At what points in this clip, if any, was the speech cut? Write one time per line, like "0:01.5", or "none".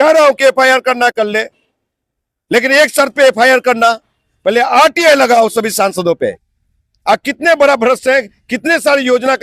none